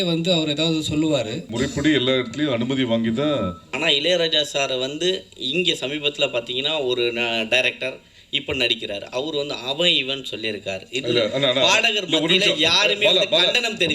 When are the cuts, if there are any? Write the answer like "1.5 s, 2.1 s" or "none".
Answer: 1.5 s, 3.7 s